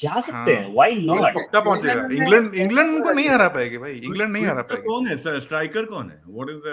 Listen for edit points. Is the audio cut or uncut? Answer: uncut